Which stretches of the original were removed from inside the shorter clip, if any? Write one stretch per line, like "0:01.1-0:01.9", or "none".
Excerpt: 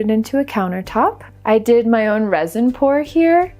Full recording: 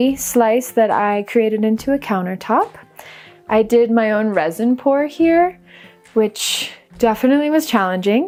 0:02.8-0:03.3